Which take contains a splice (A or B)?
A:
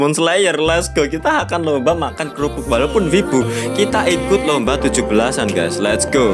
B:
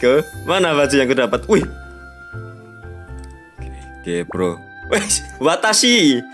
B